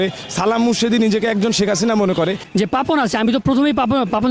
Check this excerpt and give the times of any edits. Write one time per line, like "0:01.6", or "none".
0:02.5